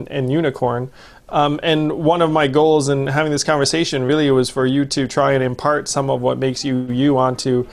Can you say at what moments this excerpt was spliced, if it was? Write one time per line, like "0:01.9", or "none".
none